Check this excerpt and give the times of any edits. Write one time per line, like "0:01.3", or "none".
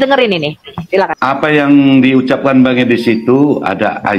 0:01.1